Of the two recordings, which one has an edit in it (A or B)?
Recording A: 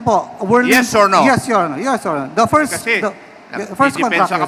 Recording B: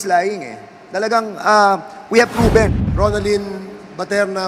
B